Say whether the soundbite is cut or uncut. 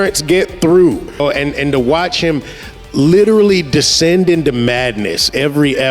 cut